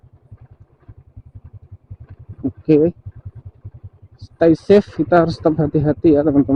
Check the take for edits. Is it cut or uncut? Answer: uncut